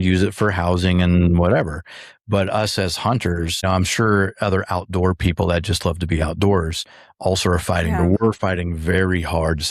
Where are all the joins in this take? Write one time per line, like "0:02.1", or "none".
0:03.6